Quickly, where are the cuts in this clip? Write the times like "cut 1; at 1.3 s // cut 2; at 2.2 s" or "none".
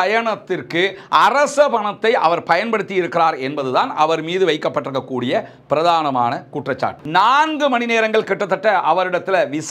cut 1; at 6.9 s